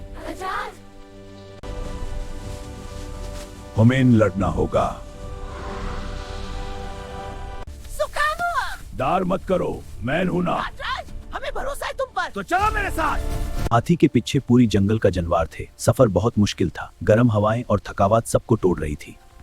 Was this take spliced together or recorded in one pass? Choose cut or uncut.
cut